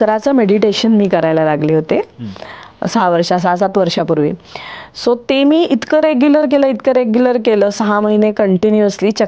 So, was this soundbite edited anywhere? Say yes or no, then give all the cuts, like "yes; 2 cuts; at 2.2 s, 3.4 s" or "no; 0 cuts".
no; 0 cuts